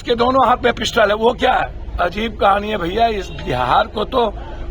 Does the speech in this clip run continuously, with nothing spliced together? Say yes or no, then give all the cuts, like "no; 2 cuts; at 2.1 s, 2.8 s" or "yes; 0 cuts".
no; 1 cut; at 1.7 s